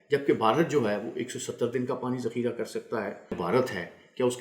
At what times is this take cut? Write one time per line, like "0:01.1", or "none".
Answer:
0:03.4